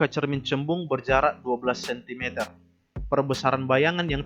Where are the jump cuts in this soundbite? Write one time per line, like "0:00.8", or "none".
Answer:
none